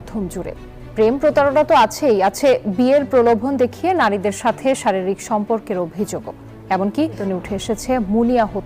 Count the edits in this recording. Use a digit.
1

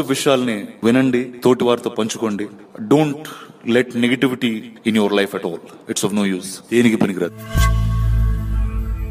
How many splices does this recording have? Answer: 1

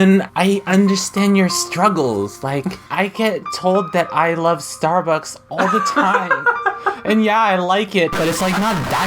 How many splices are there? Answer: 0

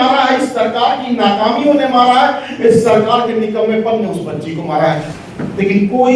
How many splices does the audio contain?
1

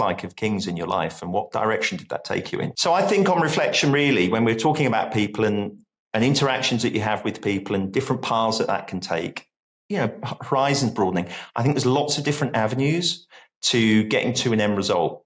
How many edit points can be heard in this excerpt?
1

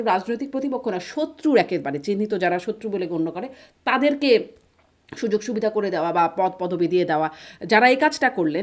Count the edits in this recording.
0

